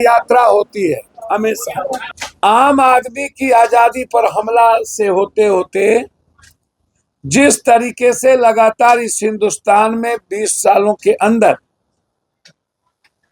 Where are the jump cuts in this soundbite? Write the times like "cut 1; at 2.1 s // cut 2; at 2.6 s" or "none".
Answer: cut 1; at 2.1 s